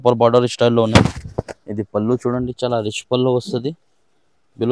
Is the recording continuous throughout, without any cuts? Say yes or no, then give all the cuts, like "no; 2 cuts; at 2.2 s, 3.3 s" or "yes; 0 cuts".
yes; 0 cuts